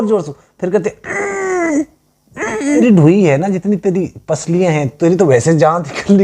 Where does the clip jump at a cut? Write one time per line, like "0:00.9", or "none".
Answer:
0:02.8